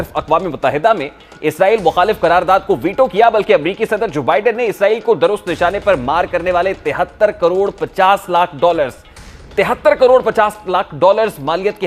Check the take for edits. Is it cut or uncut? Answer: uncut